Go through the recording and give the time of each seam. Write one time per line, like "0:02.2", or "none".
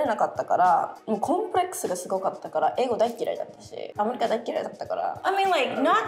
0:01.0
0:03.9
0:05.2